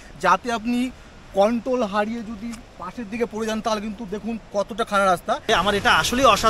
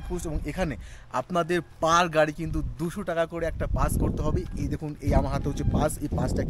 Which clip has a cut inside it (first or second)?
first